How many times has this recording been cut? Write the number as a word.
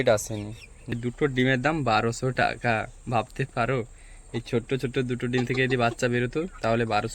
one